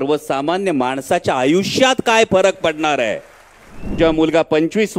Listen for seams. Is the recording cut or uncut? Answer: cut